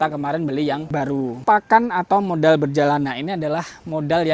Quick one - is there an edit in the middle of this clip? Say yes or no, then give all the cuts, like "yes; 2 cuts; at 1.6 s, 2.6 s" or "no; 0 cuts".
yes; 1 cut; at 1.4 s